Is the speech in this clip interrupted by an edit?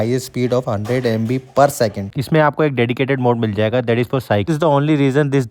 yes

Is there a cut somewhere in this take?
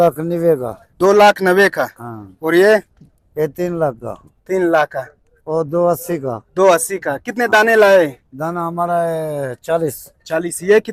no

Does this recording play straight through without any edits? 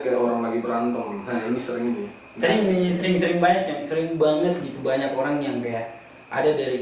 yes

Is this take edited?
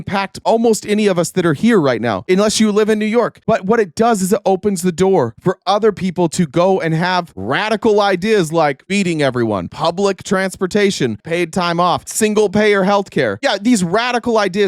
yes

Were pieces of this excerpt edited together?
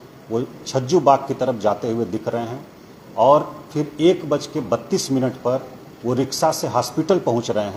no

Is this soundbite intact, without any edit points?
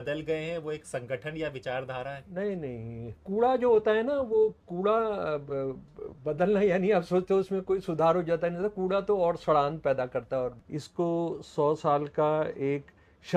no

